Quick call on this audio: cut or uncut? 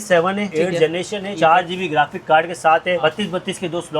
cut